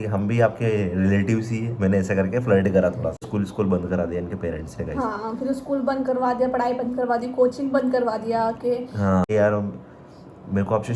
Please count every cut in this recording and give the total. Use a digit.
2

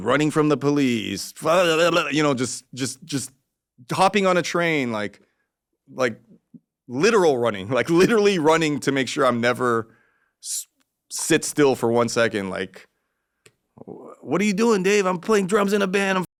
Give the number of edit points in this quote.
0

